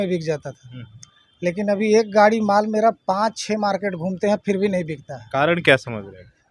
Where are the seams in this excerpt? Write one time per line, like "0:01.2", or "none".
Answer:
none